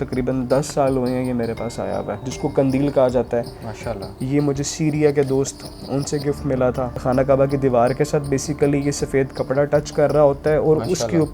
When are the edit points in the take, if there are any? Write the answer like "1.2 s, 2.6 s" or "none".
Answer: 2.3 s, 7.0 s